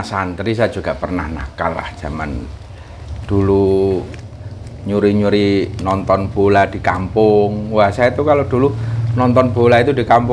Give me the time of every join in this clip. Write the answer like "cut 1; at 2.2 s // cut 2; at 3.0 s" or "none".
none